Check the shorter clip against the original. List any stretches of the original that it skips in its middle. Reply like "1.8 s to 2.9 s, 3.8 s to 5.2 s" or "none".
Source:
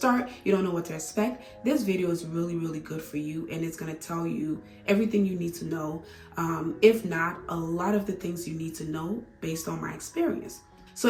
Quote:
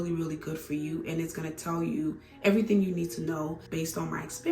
6.1 s to 9.3 s